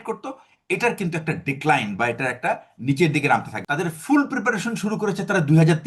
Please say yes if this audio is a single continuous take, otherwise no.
no